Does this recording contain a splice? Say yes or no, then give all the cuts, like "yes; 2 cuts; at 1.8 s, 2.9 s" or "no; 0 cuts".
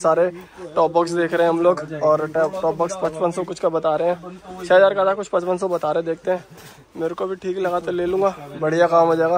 no; 0 cuts